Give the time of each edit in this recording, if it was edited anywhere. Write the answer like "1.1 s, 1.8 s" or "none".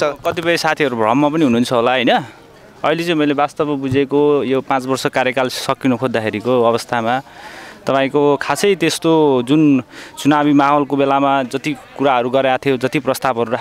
none

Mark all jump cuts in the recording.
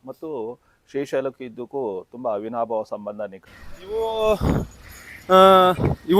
3.4 s

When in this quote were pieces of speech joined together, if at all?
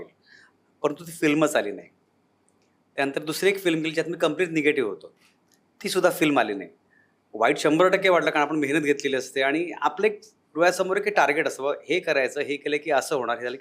none

